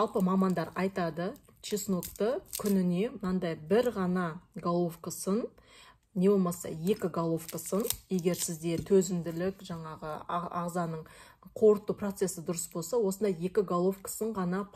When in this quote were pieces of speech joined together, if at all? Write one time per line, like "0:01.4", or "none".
none

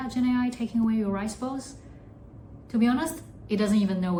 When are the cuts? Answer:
none

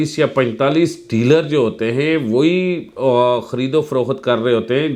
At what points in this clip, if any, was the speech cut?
none

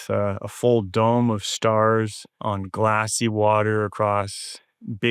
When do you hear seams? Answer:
0:02.3

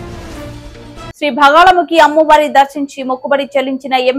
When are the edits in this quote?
0:01.2

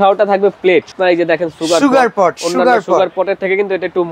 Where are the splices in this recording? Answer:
0:00.9

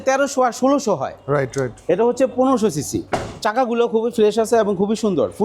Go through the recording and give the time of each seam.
none

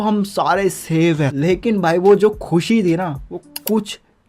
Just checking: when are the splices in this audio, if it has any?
0:01.3

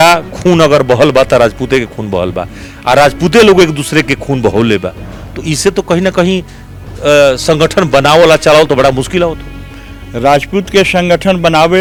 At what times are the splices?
none

